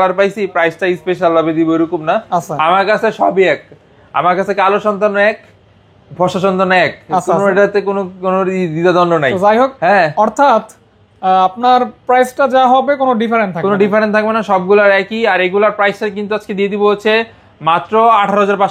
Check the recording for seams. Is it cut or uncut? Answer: uncut